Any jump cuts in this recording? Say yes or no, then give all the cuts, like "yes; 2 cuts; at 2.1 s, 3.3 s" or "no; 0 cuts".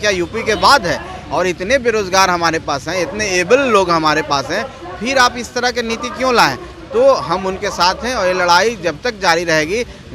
no; 0 cuts